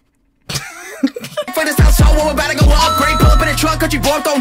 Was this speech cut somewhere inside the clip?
yes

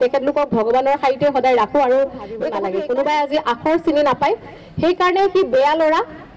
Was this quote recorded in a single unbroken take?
no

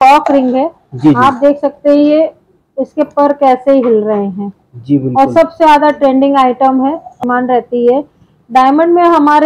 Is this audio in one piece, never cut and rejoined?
no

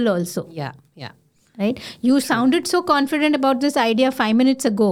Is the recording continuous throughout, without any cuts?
yes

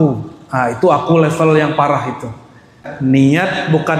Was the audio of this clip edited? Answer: yes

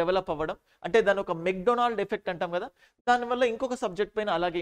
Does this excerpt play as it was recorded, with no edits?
yes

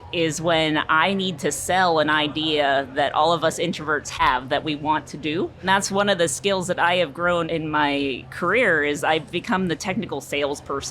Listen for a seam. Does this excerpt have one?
yes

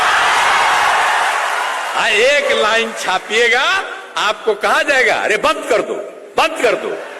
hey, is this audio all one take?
yes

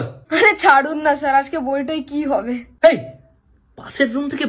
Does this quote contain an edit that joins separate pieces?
no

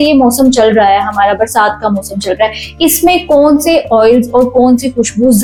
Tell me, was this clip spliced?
no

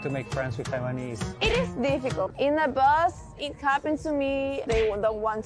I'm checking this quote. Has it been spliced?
yes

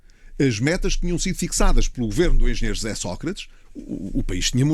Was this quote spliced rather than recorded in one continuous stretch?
no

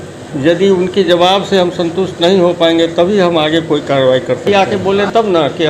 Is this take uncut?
no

